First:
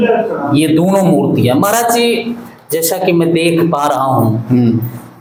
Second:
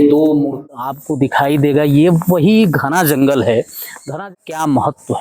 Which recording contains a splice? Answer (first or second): second